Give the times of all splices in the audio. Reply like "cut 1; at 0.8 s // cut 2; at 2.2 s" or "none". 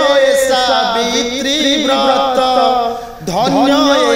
none